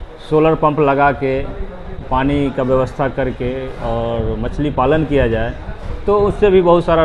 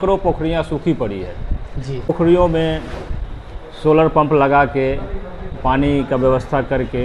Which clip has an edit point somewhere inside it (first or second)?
second